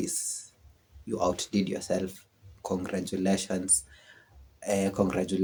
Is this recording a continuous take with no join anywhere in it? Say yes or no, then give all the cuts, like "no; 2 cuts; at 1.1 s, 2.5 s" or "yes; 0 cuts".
yes; 0 cuts